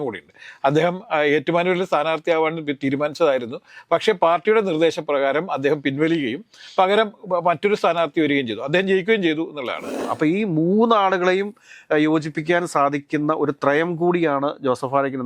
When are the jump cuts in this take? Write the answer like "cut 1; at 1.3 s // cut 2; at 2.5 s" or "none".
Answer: cut 1; at 9.9 s